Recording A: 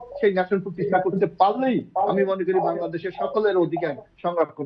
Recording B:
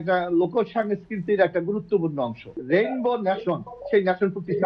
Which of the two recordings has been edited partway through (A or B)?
B